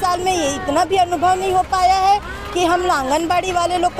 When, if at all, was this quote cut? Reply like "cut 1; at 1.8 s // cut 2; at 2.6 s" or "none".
none